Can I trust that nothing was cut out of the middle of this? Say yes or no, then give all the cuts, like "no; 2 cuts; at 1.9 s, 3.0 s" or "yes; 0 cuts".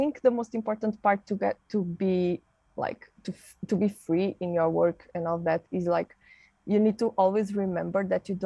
yes; 0 cuts